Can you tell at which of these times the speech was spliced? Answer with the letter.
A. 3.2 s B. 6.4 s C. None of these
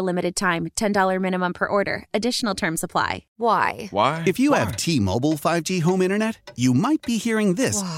A